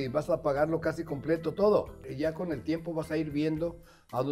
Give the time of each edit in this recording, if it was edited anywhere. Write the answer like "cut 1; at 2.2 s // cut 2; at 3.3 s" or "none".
cut 1; at 2.1 s